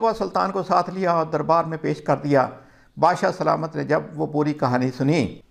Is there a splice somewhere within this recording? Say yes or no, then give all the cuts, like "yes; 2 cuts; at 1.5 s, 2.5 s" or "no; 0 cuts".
no; 0 cuts